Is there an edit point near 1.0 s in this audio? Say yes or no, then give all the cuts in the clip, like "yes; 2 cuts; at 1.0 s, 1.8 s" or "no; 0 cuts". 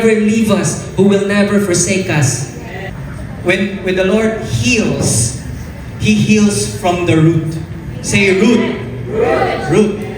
no; 1 cut; at 2.9 s